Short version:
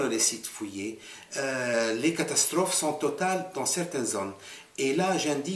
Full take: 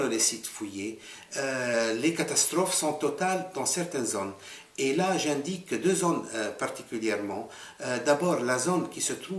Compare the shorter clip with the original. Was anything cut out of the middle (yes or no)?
no